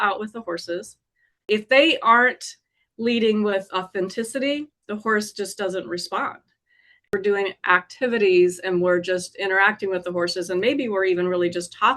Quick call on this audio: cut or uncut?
cut